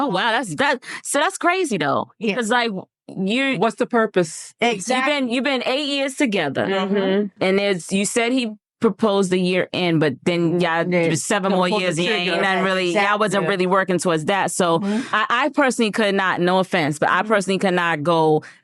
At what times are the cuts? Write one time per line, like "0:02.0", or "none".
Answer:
0:15.1